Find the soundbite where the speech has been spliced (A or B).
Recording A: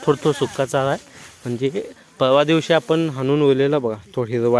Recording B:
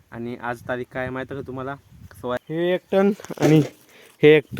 B